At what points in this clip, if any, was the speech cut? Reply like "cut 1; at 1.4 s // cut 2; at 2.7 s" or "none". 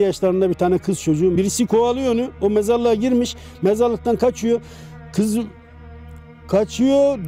none